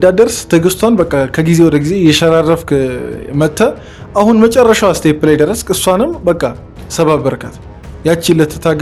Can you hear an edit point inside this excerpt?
no; 0 cuts

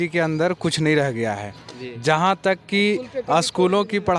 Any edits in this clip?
no; 0 cuts

